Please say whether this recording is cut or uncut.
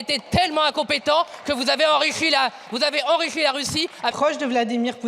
cut